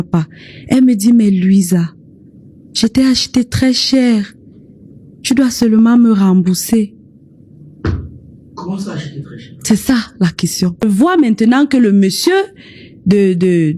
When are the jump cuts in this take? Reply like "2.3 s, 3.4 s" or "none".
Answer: 10.8 s